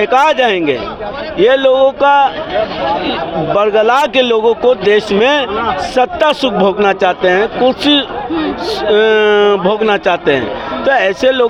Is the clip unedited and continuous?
yes; 0 cuts

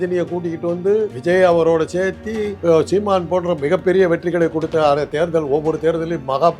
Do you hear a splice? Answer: yes; 2 cuts; at 1.1 s, 2.5 s

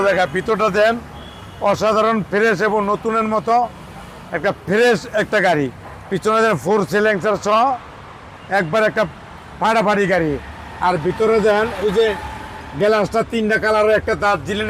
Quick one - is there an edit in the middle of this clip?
no; 0 cuts

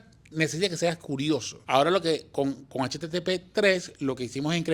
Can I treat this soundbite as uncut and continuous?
no; 1 cut; at 1.5 s

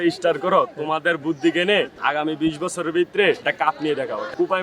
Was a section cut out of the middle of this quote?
yes; 2 cuts; at 1.9 s, 3.4 s

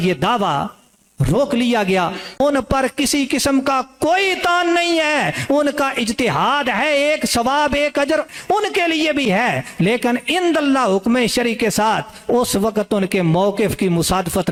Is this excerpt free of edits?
yes; 0 cuts

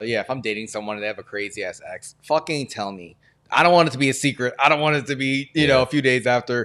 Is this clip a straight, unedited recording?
yes; 0 cuts

